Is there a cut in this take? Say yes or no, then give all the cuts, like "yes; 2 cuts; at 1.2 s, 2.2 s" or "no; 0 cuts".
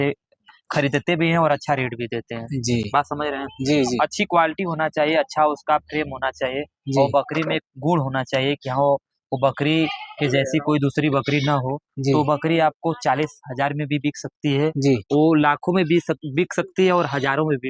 no; 0 cuts